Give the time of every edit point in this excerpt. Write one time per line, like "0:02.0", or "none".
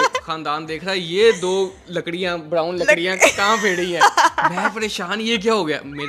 none

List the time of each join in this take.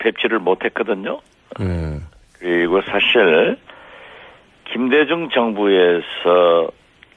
0:03.3

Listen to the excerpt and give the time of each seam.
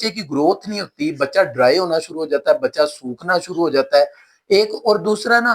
none

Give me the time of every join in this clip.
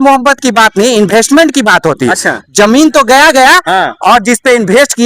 none

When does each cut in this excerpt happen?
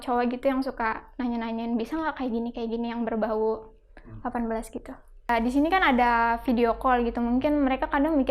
0:05.3

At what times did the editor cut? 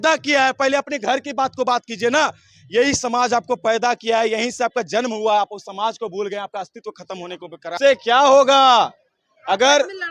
0:07.7

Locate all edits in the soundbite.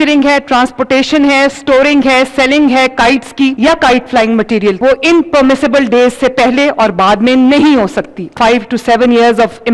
0:03.5
0:04.8
0:08.3

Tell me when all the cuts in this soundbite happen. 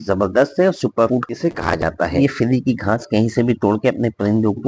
0:02.2

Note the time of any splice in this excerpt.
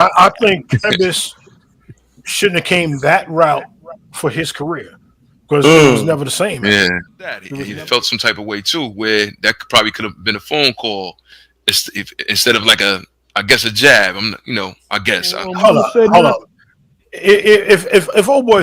0:07.6
0:15.5

